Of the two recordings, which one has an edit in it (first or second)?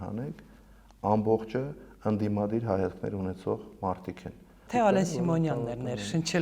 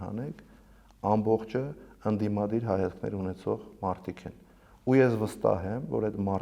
first